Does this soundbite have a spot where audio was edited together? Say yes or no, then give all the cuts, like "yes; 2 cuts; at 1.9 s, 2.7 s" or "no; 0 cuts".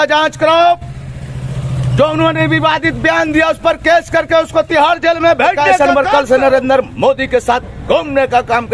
yes; 1 cut; at 5.7 s